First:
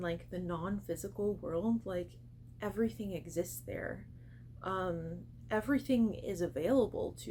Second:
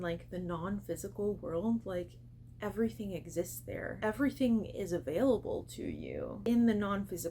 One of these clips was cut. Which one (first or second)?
second